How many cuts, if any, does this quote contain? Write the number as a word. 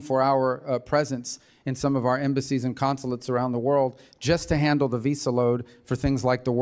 zero